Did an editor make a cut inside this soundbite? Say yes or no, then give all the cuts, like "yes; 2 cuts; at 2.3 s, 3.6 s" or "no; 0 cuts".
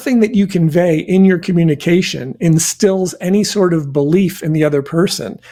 no; 0 cuts